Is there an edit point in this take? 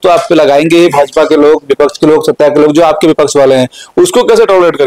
no; 0 cuts

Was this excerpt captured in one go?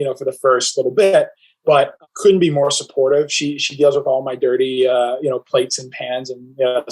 yes; 0 cuts

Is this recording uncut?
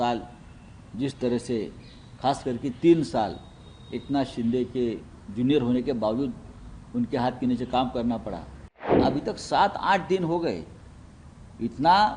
no; 1 cut; at 9.0 s

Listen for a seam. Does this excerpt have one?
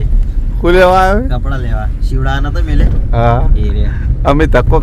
no; 0 cuts

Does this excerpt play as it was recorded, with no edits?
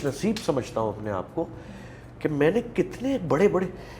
yes; 0 cuts

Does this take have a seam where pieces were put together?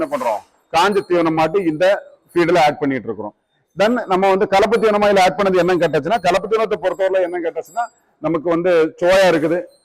no; 0 cuts

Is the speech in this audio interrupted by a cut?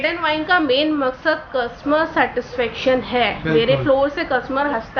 no; 0 cuts

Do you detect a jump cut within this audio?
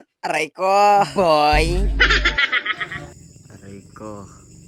no; 0 cuts

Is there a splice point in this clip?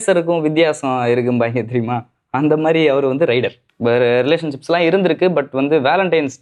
yes; 1 cut; at 3.6 s

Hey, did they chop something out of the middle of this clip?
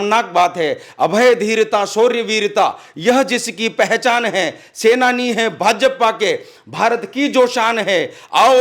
no; 0 cuts

